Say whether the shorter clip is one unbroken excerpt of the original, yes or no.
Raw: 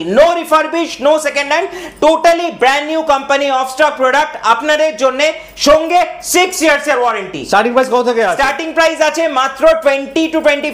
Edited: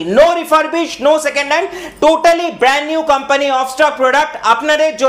yes